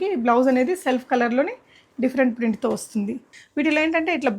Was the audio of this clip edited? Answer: yes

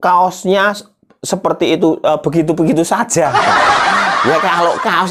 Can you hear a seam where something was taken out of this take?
no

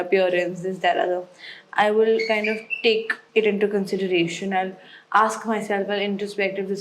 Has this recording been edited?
yes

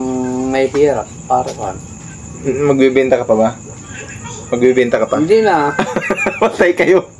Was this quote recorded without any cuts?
yes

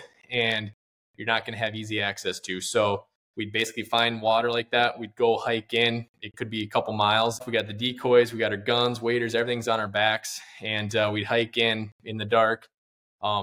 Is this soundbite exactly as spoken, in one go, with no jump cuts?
no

